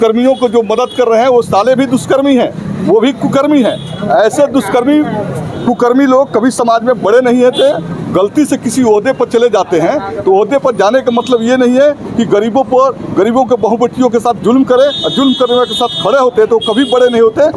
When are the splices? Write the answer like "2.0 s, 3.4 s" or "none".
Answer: none